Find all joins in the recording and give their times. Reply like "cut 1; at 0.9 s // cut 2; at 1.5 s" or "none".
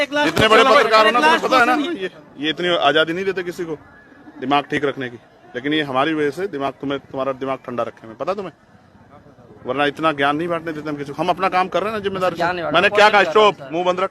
cut 1; at 1.9 s